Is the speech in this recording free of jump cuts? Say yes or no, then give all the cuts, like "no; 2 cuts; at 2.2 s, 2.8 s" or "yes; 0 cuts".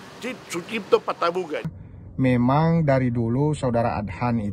no; 1 cut; at 1.7 s